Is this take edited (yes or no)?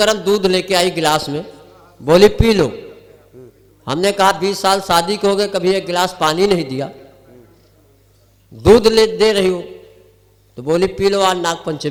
no